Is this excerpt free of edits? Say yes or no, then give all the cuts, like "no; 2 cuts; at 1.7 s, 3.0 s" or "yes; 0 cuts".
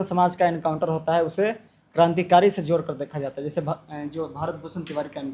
yes; 0 cuts